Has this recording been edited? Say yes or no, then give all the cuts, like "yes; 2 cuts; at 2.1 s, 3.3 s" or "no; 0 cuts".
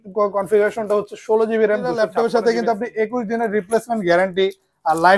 yes; 1 cut; at 1.9 s